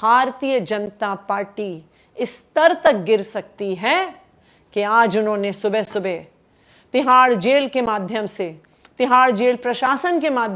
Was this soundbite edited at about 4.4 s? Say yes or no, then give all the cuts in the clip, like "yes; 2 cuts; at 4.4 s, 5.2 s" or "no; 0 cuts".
no; 0 cuts